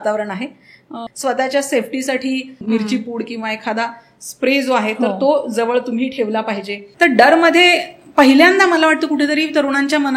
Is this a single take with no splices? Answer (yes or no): no